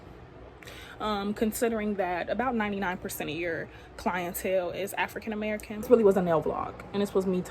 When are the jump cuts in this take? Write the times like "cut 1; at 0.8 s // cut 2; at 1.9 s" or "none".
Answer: cut 1; at 5.9 s